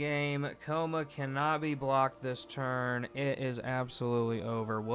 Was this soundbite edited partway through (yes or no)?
no